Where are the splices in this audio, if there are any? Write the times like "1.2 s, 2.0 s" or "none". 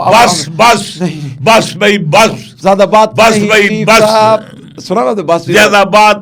none